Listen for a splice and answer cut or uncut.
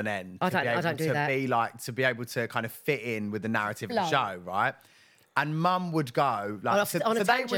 uncut